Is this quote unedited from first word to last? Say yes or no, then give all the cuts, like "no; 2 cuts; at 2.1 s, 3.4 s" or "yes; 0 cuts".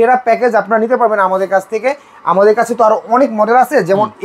yes; 0 cuts